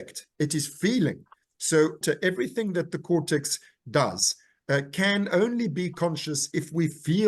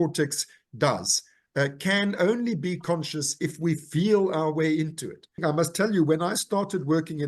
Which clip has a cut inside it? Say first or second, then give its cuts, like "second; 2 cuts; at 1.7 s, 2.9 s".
second; 1 cut; at 5.4 s